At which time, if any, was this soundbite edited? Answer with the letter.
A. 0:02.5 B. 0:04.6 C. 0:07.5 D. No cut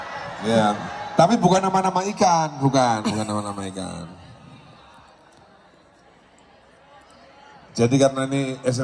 D